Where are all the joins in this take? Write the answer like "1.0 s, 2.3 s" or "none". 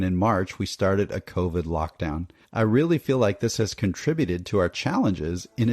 2.4 s

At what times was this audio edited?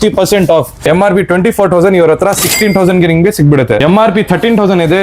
0.8 s, 3.8 s

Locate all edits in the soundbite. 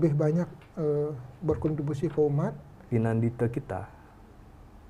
2.7 s

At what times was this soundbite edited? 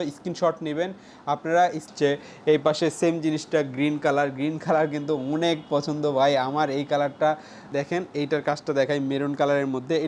1.9 s, 7.7 s

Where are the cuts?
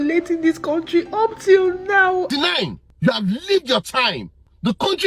2.3 s

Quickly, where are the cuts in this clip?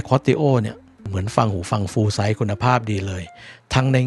1.1 s

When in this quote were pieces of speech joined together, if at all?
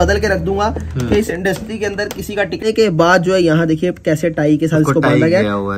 2.6 s

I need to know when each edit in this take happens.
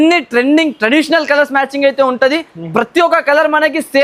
none

